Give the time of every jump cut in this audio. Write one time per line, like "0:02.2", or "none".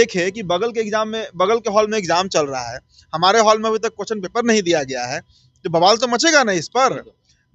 none